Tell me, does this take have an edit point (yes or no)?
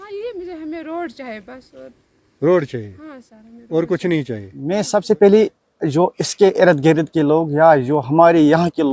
yes